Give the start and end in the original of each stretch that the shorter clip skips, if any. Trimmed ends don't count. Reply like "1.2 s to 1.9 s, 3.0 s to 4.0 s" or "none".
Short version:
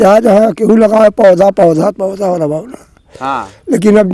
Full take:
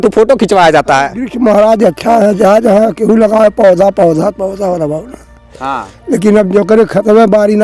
none